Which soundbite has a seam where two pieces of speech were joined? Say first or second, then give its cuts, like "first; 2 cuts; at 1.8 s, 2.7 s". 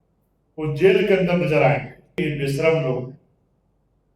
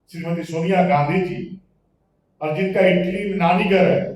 first; 1 cut; at 2.2 s